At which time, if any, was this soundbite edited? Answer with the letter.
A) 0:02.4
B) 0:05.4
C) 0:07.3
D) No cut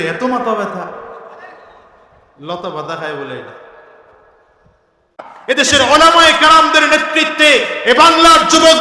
B